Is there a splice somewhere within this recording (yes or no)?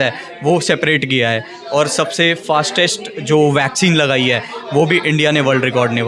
no